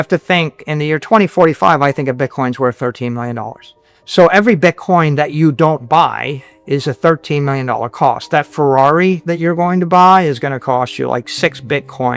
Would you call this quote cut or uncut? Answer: uncut